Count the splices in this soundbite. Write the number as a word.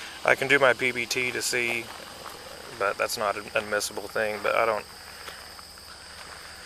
zero